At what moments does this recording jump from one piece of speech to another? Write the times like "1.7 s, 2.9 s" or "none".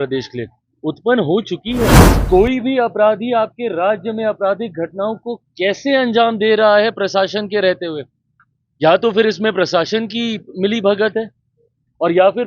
2.1 s